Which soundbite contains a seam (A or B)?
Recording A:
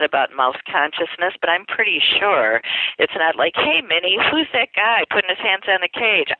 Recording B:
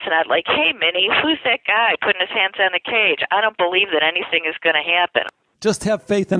B